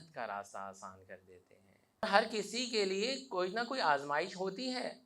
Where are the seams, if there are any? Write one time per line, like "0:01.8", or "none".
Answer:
0:02.0